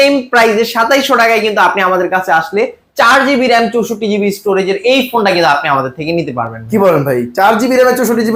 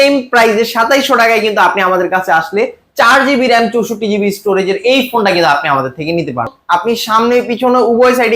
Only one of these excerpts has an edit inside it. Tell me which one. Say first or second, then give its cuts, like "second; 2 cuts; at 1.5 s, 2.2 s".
second; 1 cut; at 6.6 s